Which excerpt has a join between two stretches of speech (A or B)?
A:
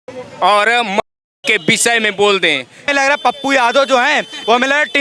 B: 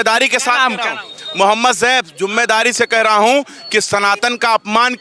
A